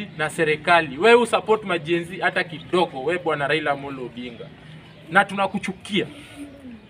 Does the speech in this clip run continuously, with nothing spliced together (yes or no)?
yes